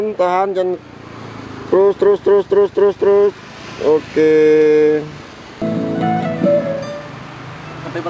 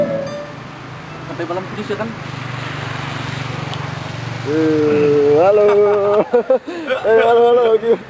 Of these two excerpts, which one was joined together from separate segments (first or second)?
first